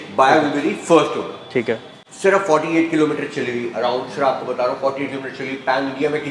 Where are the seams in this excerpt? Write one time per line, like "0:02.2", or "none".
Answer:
none